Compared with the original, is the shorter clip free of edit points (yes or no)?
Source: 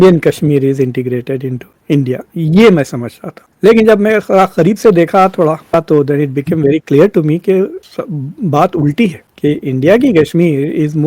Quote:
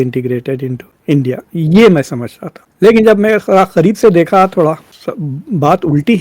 no